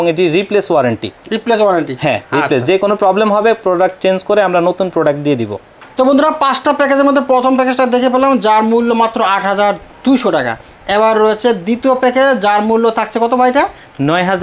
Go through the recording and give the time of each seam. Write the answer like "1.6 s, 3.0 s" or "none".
none

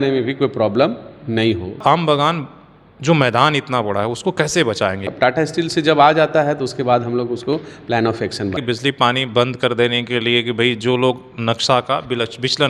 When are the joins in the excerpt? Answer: 1.8 s, 5.1 s

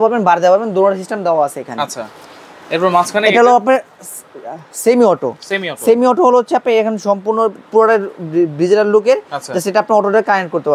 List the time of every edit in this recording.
none

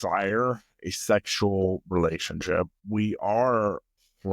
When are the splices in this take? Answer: 2.8 s

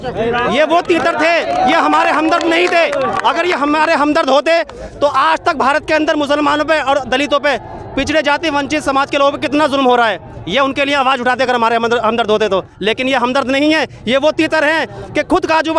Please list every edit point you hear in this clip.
none

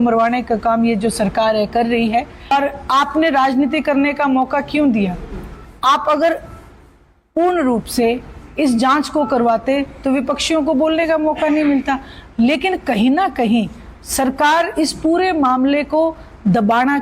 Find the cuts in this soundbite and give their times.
2.5 s

